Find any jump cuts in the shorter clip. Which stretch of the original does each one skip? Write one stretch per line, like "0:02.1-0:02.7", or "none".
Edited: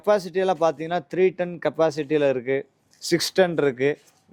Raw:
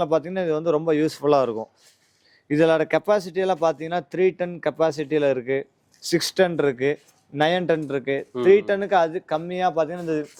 none